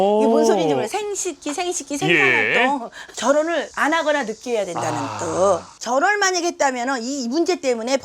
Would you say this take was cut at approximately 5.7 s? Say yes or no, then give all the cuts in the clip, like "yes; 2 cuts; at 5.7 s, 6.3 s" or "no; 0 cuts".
yes; 2 cuts; at 3.1 s, 5.7 s